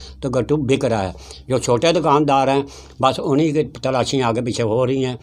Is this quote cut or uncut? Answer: uncut